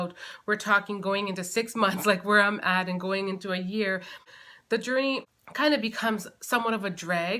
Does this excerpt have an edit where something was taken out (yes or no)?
yes